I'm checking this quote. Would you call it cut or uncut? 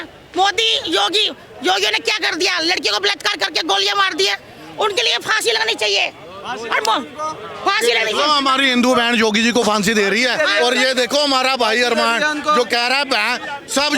uncut